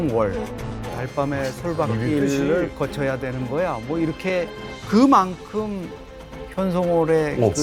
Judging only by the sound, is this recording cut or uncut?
cut